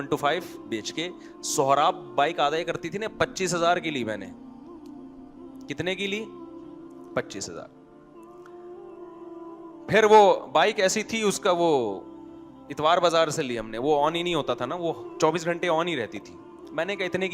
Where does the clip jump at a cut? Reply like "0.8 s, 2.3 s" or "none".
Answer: 7.7 s, 9.7 s